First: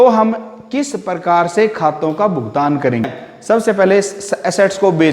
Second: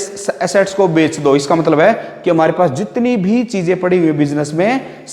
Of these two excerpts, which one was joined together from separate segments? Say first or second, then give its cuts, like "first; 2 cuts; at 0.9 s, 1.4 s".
first; 1 cut; at 3.1 s